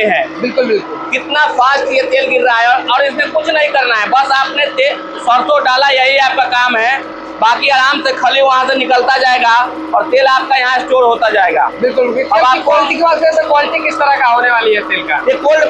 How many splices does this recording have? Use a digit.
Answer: 0